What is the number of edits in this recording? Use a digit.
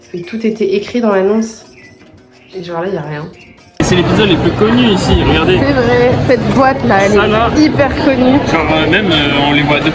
1